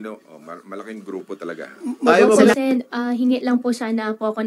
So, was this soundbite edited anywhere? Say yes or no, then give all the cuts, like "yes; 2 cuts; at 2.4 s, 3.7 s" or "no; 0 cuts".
yes; 1 cut; at 2.5 s